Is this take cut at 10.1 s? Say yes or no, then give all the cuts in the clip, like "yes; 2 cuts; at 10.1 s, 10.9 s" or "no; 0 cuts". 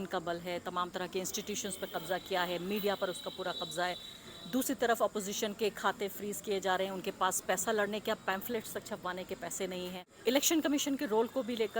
yes; 1 cut; at 10.1 s